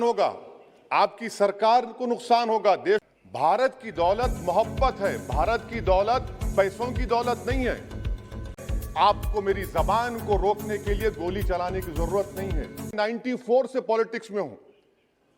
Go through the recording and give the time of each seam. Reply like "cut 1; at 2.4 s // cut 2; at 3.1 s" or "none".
cut 1; at 3.1 s // cut 2; at 8.6 s // cut 3; at 12.9 s

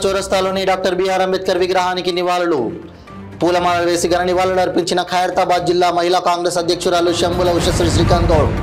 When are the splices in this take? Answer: none

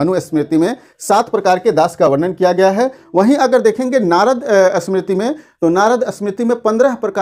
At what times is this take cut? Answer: none

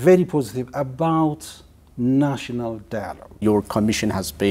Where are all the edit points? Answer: cut 1; at 3.3 s

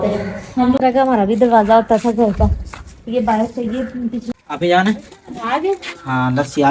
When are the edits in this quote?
cut 1; at 0.8 s // cut 2; at 4.3 s

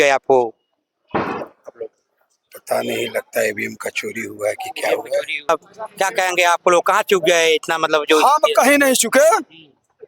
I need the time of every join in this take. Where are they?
cut 1; at 5.5 s

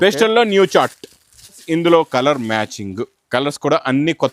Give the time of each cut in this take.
cut 1; at 1.6 s

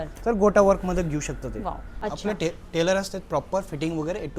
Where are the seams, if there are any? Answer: cut 1; at 1.9 s

